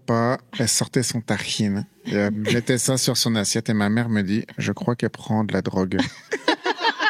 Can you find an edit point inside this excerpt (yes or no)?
no